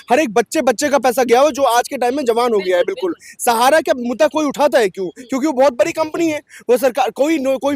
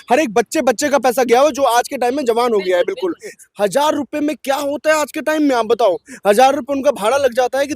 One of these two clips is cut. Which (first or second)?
second